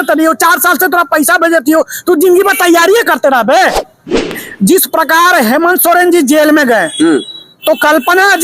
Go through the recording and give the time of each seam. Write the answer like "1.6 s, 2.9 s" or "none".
4.4 s